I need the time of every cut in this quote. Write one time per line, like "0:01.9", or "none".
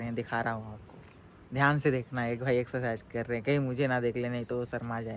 none